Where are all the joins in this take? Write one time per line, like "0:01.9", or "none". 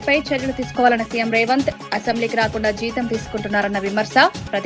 none